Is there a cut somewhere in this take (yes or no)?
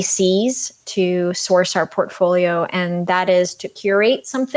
no